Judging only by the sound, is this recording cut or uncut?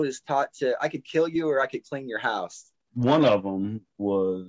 cut